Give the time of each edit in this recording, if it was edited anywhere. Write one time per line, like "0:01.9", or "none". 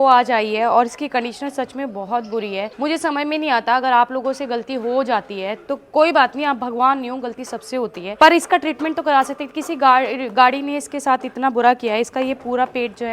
none